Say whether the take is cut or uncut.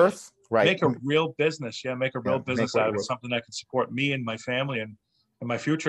uncut